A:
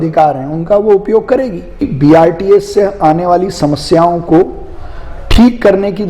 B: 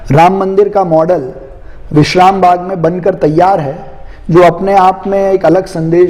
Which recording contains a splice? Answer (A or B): A